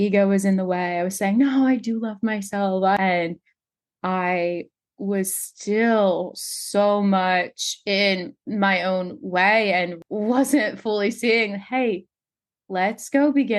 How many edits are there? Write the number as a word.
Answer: two